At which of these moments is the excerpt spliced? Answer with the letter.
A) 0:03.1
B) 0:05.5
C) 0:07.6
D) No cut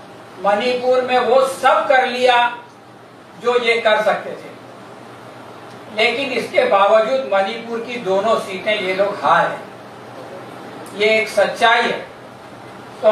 D